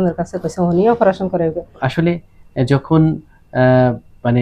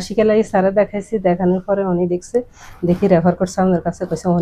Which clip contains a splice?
first; 1 cut; at 1.7 s

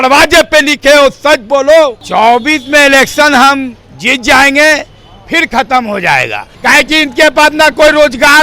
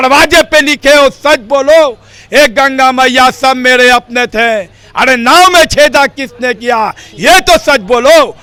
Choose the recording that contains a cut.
first; 2 cuts; at 2.0 s, 6.4 s

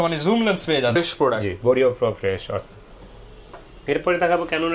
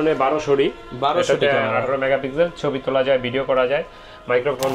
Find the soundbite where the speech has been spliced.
first; 1 cut; at 1.0 s

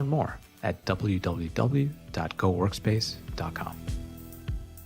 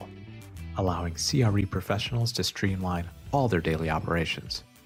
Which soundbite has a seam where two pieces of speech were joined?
first; 1 cut; at 3.7 s

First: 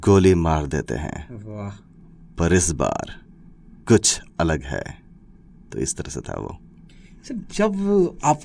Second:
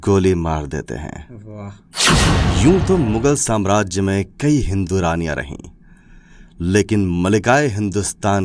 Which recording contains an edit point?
second; 1 cut; at 2.1 s

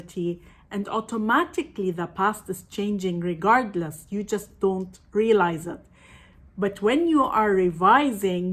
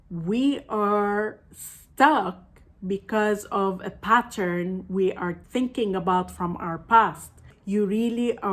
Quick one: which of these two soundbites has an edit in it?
second; 2 cuts; at 5.4 s, 7.5 s

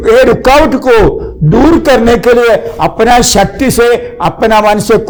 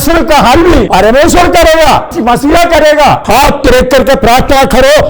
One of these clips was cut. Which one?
second; 3 cuts; at 0.9 s, 2.1 s, 3.2 s

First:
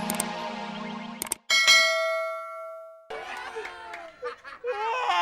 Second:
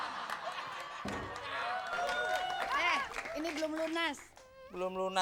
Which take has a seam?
first; 2 cuts; at 1.1 s, 3.1 s

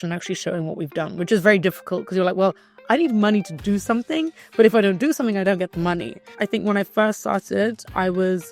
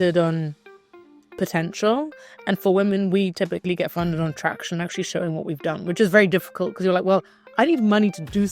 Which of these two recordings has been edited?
first; 1 cut; at 6.3 s

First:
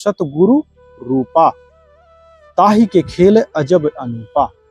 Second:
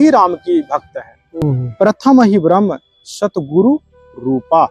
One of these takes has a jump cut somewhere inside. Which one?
second; 1 cut; at 1.4 s

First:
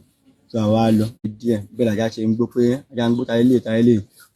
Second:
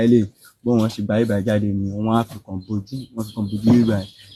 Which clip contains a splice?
first; 1 cut; at 1.2 s

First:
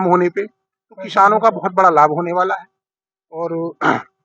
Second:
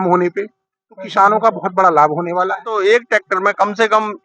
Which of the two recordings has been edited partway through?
second; 1 cut; at 2.7 s

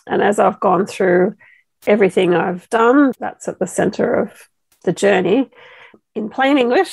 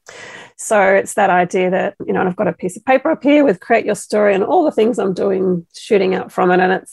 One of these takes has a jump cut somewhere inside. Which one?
first; 1 cut; at 5.9 s

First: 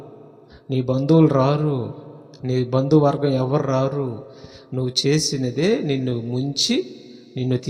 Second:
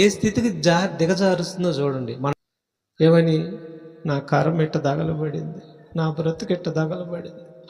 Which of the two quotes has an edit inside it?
second; 1 cut; at 2.3 s

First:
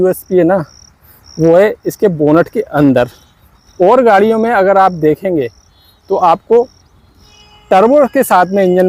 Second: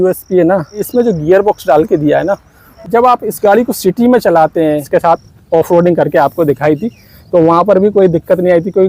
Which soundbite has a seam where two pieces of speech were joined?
second; 3 cuts; at 0.9 s, 2.8 s, 4.8 s

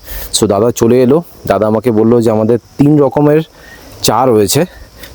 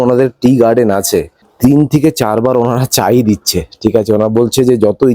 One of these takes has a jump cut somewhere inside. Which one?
second; 1 cut; at 1.5 s

